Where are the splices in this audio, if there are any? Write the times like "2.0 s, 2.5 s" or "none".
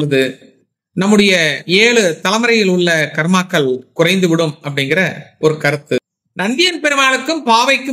6.0 s